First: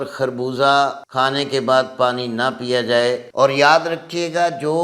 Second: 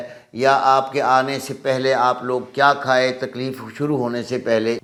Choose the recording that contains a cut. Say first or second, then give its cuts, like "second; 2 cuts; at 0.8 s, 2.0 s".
first; 2 cuts; at 1.0 s, 3.2 s